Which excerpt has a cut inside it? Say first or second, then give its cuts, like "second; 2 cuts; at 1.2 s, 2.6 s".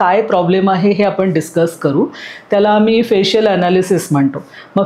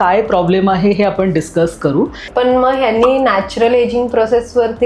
second; 1 cut; at 2.3 s